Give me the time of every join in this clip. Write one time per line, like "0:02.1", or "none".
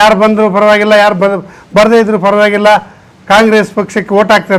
none